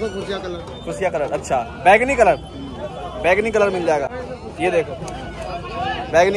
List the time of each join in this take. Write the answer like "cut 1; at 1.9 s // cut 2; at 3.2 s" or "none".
none